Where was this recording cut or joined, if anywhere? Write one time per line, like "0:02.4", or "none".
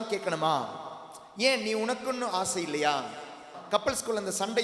0:03.5